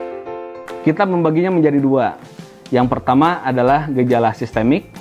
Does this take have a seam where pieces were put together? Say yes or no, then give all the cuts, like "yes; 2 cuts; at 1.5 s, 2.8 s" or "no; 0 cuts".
no; 0 cuts